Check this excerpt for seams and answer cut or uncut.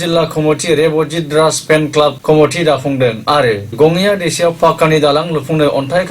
cut